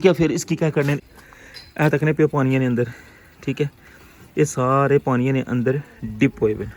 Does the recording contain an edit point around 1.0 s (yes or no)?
yes